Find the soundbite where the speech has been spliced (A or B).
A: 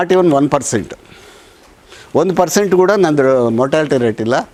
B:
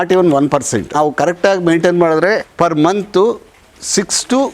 B